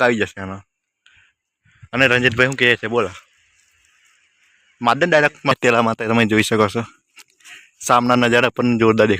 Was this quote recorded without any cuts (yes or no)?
no